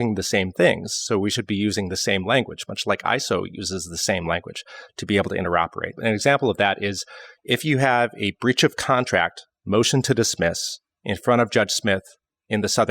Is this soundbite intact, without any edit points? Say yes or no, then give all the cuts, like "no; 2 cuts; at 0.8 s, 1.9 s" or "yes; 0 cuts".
no; 1 cut; at 5.9 s